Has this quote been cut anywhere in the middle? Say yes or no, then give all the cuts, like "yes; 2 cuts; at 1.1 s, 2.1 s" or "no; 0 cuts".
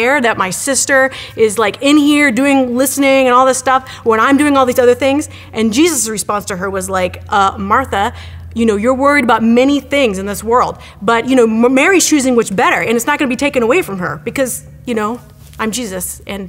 no; 0 cuts